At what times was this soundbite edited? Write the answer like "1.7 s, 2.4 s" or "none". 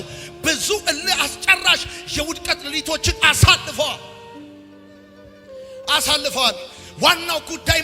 none